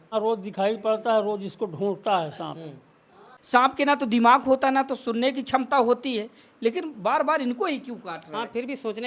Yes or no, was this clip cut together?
yes